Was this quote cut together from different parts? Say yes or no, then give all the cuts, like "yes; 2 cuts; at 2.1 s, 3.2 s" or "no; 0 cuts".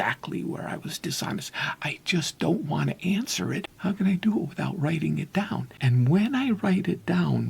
yes; 2 cuts; at 3.7 s, 5.7 s